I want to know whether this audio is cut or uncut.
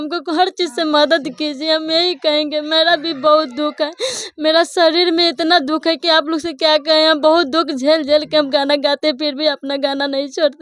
uncut